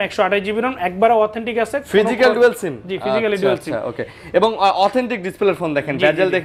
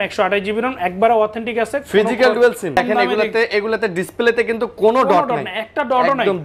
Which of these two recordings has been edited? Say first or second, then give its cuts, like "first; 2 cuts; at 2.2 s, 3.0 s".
second; 1 cut; at 2.8 s